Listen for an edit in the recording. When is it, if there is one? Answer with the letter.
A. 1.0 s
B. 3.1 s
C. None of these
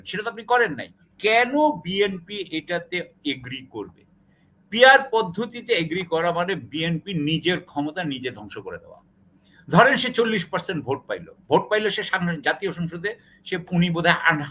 A